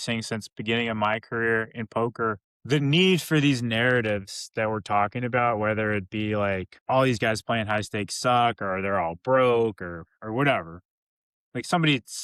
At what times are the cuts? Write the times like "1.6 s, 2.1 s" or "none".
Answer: 2.5 s, 6.7 s